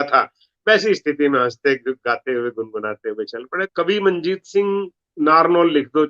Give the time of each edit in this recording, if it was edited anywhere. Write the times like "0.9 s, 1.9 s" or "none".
3.6 s